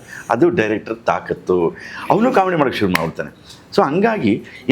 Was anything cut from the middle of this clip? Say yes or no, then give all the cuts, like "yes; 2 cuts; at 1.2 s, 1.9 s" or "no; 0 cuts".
no; 0 cuts